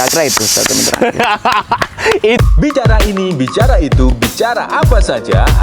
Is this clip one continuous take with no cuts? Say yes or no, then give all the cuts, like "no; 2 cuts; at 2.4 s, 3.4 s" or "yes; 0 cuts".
no; 1 cut; at 2.4 s